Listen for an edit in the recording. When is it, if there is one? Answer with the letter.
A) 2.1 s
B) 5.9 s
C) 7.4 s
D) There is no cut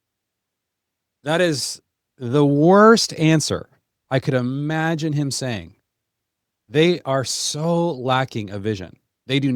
D